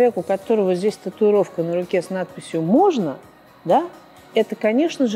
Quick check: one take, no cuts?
yes; 0 cuts

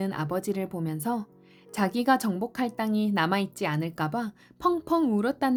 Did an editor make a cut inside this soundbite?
no; 0 cuts

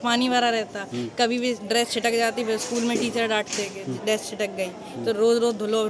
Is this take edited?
no; 0 cuts

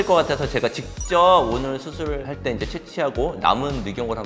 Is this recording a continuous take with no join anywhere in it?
yes; 0 cuts

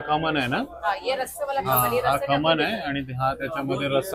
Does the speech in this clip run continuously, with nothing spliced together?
yes; 0 cuts

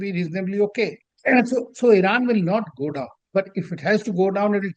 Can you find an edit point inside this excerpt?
yes; 1 cut; at 1.1 s

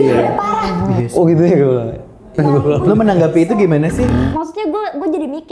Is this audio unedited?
no; 2 cuts; at 2.4 s, 4.1 s

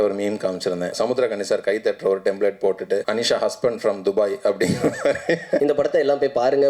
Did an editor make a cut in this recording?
yes; 3 cuts; at 1.0 s, 3.0 s, 5.6 s

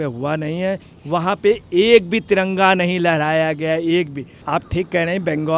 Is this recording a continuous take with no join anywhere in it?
no; 2 cuts; at 0.9 s, 4.4 s

